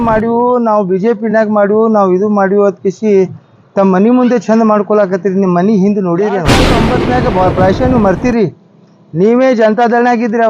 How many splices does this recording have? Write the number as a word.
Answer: one